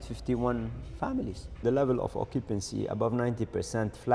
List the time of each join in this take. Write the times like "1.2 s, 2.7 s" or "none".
1.6 s